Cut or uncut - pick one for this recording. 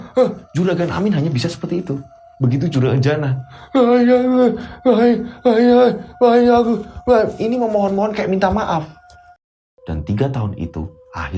cut